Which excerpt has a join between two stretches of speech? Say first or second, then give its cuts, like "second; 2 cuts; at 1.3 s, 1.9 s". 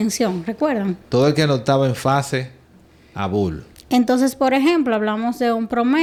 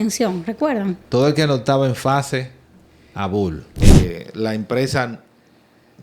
second; 1 cut; at 3.8 s